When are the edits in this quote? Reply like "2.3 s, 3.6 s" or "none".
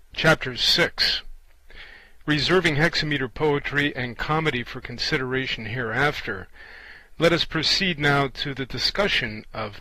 5.7 s